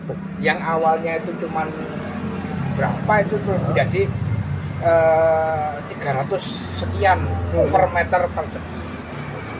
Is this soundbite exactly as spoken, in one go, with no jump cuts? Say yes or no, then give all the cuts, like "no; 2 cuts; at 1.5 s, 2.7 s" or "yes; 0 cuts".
yes; 0 cuts